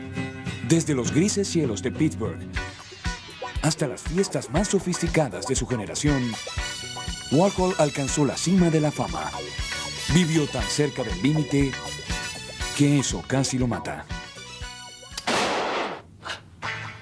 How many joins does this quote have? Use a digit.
1